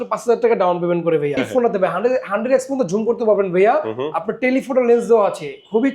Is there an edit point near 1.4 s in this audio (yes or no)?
yes